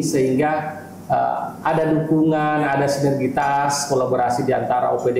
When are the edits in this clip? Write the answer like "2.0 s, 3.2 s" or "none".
none